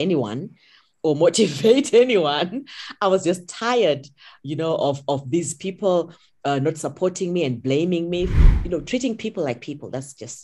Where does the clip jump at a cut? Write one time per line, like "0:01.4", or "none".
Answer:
0:08.3